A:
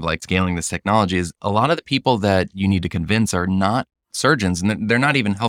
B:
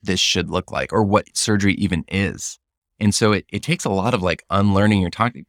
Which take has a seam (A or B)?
A